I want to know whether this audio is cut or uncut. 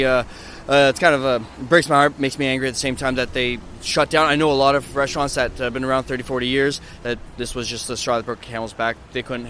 uncut